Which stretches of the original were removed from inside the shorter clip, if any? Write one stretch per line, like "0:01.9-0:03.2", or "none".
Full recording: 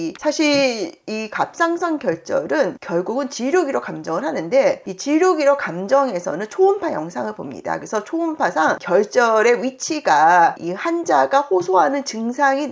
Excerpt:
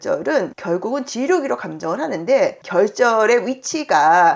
0:04.9-0:08.8